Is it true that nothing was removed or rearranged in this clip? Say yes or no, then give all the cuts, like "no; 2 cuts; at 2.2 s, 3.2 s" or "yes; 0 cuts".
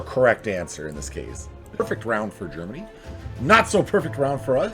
no; 1 cut; at 1.8 s